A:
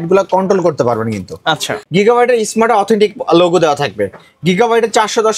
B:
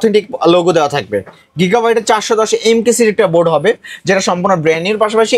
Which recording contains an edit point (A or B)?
A